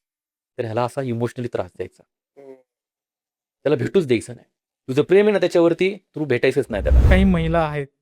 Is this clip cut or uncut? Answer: cut